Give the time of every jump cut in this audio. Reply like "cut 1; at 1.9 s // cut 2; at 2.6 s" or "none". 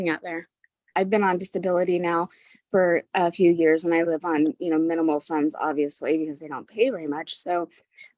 cut 1; at 0.9 s